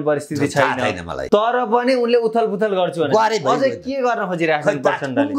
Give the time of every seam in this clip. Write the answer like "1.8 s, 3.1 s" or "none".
1.1 s